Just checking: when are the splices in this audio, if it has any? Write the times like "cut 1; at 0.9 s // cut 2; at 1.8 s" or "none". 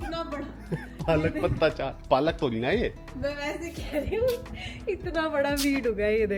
none

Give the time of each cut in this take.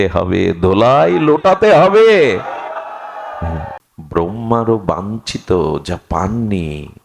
cut 1; at 3.7 s

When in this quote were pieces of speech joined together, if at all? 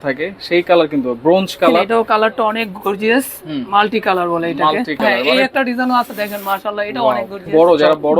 cut 1; at 1.9 s // cut 2; at 5.2 s // cut 3; at 7.4 s

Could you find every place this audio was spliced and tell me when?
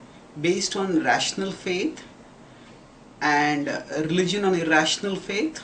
cut 1; at 4.7 s

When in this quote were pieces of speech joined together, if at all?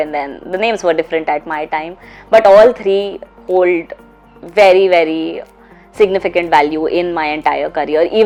none

